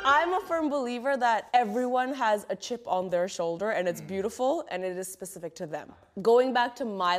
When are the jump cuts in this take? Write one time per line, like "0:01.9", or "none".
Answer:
0:01.4
0:06.0